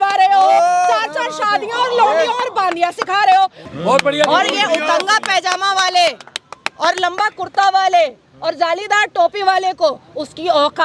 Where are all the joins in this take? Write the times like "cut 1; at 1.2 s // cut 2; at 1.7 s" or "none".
cut 1; at 3.6 s